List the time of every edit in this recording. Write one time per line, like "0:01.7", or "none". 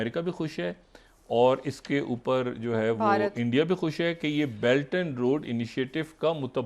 none